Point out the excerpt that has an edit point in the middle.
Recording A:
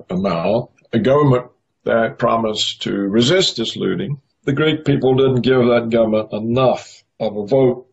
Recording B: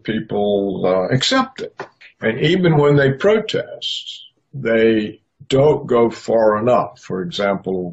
B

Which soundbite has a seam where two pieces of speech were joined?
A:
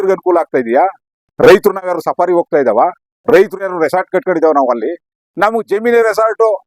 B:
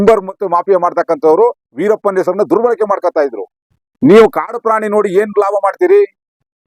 B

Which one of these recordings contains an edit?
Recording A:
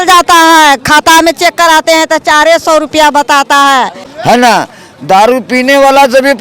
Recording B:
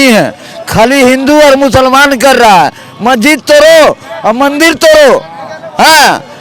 A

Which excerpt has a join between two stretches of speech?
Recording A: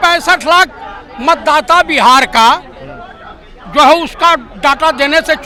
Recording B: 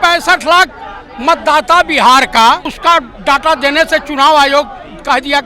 B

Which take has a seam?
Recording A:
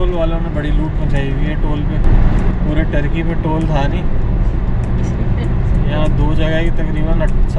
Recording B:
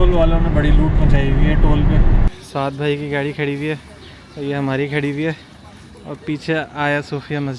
B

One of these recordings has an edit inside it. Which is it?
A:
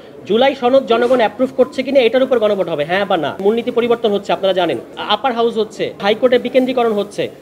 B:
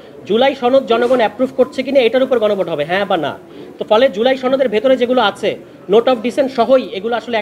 A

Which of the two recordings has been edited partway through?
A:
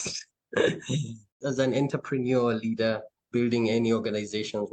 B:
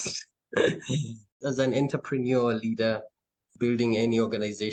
A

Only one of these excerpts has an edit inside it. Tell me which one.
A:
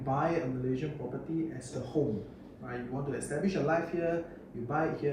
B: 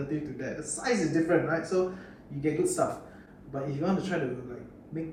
A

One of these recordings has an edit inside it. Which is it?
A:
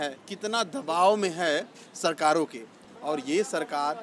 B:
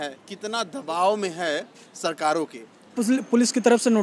B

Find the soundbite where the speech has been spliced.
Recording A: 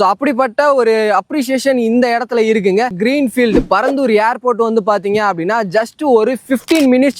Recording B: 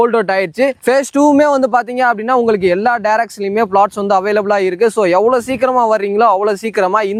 A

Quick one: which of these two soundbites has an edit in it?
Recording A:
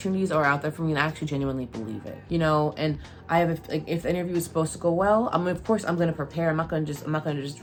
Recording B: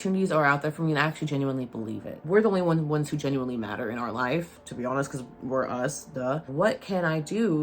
B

